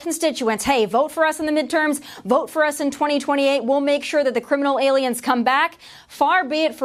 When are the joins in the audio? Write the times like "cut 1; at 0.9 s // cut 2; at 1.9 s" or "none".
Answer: none